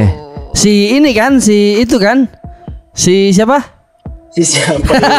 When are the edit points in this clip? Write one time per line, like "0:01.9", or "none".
none